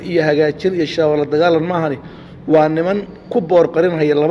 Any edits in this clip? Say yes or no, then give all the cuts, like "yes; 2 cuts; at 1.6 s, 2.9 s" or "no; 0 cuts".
no; 0 cuts